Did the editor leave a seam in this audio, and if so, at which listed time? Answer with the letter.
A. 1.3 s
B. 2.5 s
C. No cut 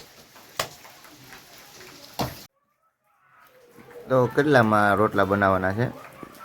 B